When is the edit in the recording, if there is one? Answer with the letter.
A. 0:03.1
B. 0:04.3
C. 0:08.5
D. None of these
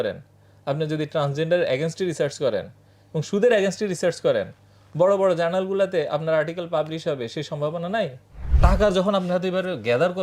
C